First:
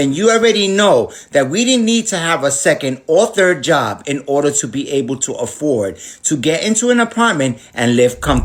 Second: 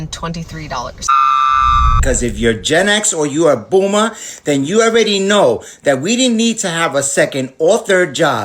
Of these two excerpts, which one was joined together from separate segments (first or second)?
second